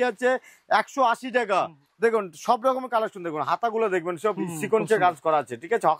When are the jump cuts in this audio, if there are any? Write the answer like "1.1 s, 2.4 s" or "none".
1.8 s